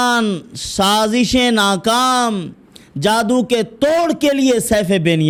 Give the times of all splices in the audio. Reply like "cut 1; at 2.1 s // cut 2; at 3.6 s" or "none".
none

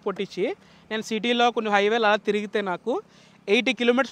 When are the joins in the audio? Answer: none

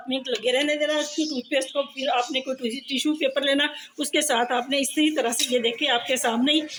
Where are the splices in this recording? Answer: none

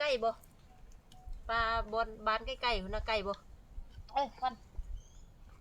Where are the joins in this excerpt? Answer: none

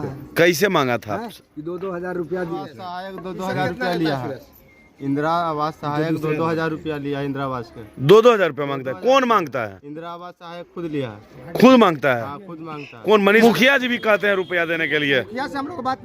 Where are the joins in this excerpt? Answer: cut 1; at 2.5 s // cut 2; at 13.4 s

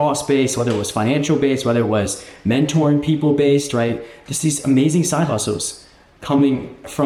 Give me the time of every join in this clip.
none

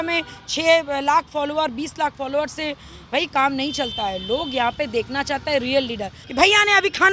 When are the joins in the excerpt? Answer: cut 1; at 6.2 s

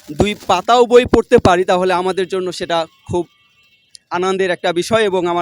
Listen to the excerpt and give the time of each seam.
none

